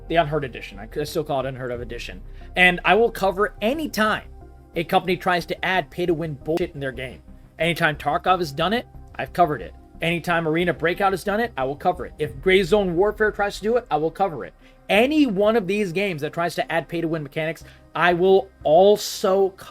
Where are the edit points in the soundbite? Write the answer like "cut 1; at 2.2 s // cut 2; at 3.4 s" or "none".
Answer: cut 1; at 6.6 s